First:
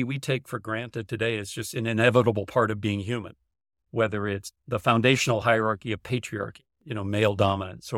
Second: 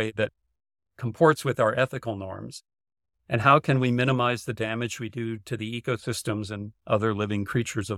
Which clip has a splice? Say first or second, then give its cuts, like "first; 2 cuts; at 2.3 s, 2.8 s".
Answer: first; 1 cut; at 4.6 s